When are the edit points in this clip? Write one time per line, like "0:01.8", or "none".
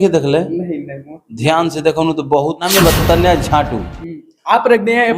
0:02.6